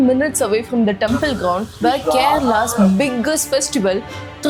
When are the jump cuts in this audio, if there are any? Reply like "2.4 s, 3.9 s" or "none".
none